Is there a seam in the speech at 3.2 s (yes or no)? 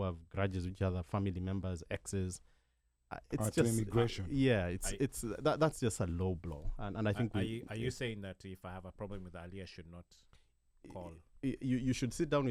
no